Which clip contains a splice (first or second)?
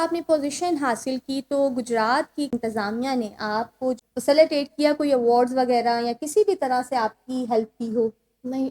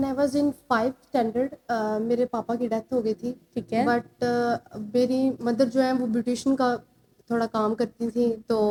first